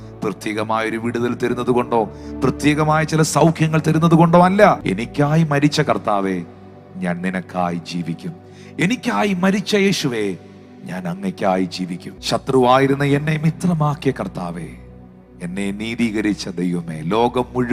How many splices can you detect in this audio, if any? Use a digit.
1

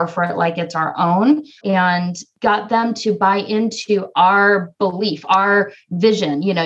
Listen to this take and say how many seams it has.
1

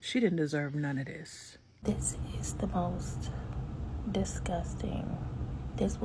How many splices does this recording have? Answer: 1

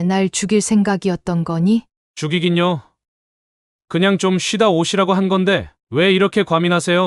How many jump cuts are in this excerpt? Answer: 1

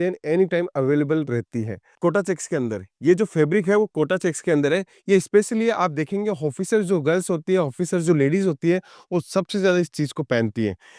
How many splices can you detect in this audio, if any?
1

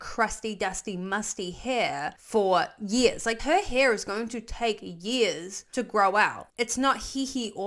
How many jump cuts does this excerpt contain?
2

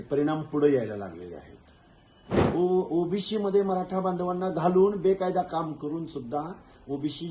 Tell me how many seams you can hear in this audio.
1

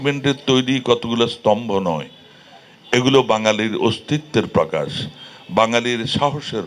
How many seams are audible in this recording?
0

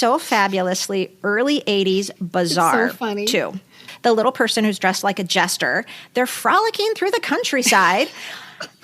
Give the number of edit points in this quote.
1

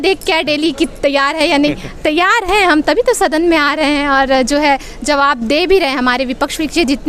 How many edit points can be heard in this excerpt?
0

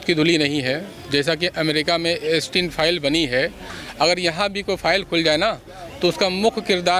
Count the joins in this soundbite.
0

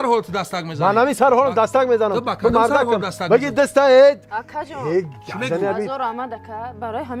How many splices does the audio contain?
0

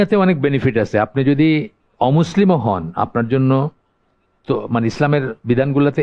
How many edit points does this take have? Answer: 0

